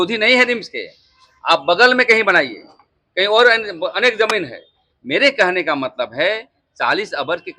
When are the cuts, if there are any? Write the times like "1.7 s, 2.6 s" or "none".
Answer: none